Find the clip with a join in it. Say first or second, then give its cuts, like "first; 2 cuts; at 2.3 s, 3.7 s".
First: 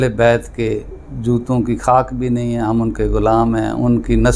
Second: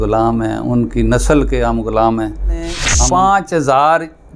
second; 1 cut; at 2.9 s